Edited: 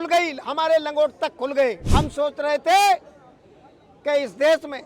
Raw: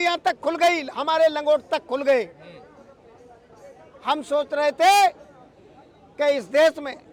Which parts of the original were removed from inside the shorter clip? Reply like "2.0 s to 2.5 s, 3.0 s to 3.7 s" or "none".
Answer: 2.3 s to 4.0 s